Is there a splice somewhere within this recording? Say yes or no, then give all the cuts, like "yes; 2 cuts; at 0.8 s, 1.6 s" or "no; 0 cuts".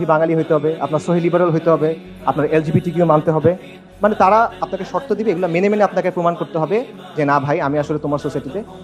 no; 0 cuts